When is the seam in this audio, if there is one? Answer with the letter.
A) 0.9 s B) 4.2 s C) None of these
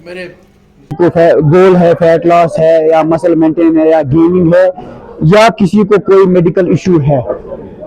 A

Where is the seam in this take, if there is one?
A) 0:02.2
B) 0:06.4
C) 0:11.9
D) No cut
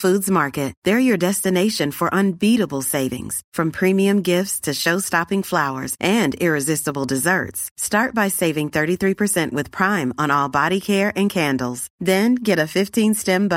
D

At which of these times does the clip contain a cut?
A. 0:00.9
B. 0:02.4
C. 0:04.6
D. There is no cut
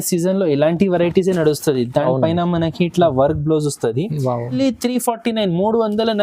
C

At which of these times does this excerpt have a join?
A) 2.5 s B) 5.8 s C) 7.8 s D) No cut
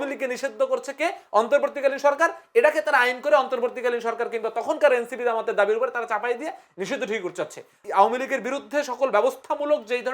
C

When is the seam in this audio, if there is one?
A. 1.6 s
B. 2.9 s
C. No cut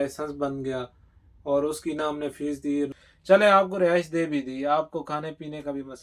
B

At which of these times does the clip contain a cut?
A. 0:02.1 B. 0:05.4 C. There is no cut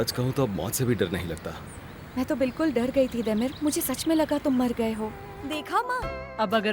B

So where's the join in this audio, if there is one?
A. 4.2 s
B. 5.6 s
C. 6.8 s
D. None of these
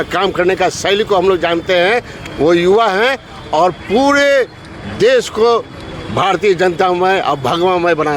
D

